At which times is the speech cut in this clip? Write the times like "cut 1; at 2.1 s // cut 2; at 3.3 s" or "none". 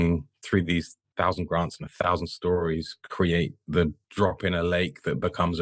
cut 1; at 1.1 s // cut 2; at 4.0 s